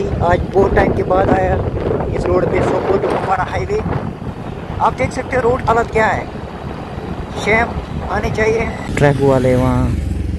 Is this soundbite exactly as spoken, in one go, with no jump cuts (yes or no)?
no